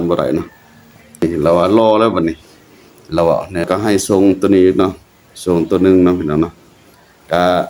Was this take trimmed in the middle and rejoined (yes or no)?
yes